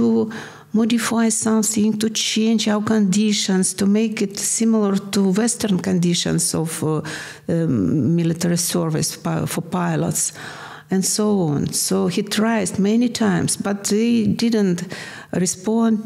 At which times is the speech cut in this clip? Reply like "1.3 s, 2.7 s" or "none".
none